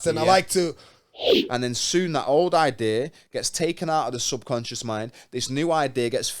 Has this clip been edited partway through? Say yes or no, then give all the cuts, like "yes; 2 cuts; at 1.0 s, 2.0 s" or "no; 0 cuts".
yes; 1 cut; at 1.4 s